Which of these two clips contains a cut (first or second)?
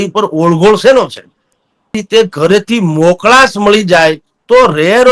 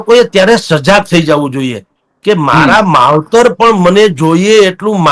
first